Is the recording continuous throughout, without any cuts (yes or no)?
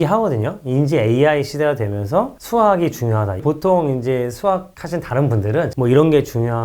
no